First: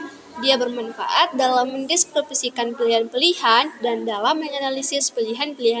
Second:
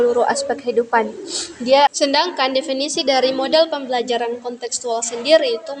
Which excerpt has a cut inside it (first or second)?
second